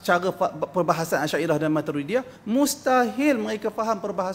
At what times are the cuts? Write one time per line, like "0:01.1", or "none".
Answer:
0:02.4